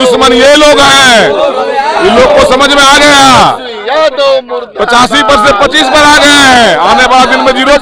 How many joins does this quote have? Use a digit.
0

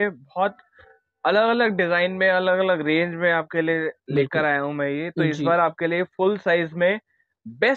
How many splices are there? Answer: 0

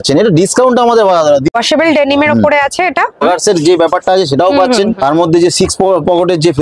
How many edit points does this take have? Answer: 2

